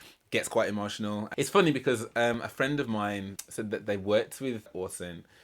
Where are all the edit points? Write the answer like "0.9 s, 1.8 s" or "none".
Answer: 1.3 s, 3.4 s, 4.7 s